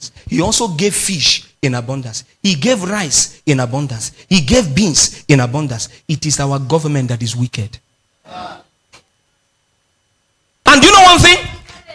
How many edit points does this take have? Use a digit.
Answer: 1